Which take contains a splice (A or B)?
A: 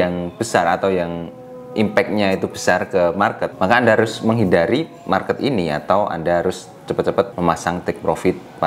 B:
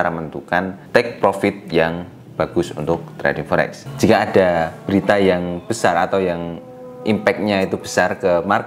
B